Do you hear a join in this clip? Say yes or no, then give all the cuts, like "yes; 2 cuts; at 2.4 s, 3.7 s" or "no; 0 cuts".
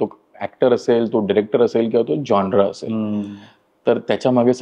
no; 0 cuts